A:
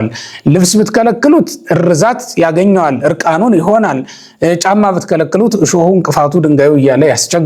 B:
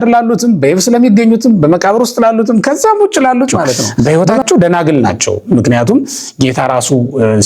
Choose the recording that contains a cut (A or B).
B